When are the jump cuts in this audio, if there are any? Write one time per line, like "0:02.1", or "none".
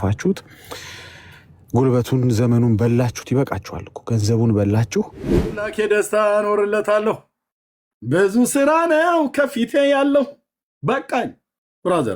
0:05.7